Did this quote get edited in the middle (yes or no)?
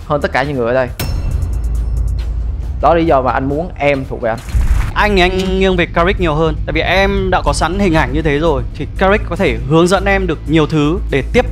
yes